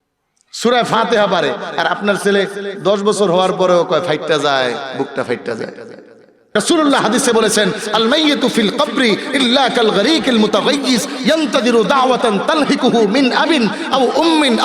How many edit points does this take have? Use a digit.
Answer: 1